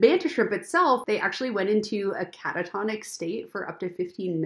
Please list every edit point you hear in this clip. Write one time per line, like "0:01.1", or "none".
0:01.0